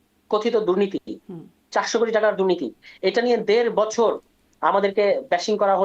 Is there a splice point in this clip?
no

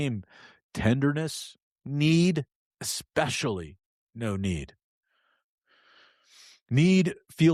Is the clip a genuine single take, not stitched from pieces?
yes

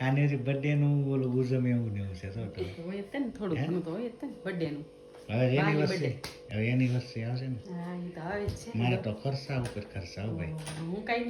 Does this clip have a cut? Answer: no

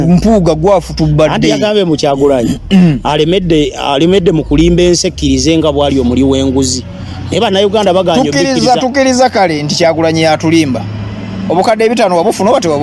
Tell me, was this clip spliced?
no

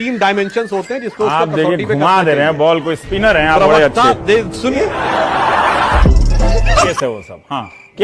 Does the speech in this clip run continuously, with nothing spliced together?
no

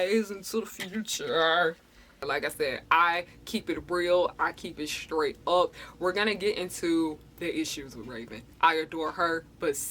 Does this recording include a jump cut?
yes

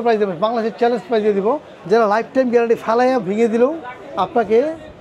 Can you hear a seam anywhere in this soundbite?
yes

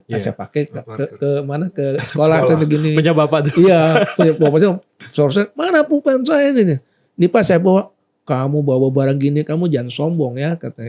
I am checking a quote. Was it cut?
no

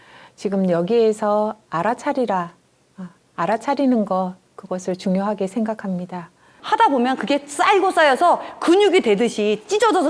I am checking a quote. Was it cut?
yes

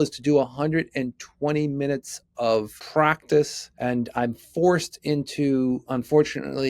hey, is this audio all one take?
no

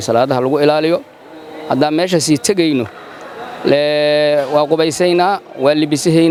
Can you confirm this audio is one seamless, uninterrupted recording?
yes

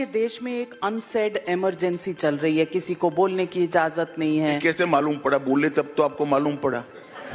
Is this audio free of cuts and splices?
yes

